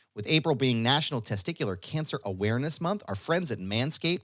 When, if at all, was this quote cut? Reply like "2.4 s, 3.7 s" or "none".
none